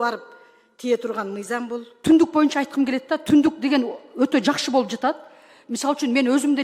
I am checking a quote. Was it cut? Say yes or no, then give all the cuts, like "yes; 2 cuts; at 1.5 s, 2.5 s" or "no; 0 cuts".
yes; 1 cut; at 2.0 s